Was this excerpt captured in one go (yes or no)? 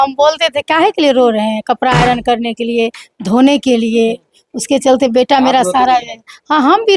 yes